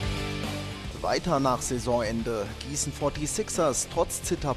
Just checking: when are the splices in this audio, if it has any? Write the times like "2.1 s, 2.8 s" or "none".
0.9 s